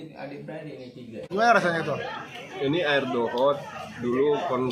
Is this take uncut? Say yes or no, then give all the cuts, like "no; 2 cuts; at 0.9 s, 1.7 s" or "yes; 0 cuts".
no; 1 cut; at 1.3 s